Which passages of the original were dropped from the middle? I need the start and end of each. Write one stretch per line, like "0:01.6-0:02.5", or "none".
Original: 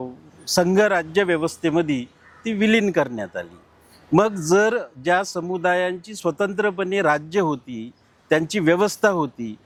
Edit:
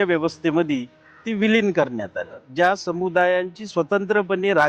0:03.6-0:04.9